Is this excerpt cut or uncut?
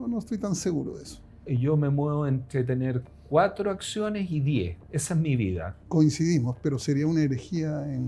cut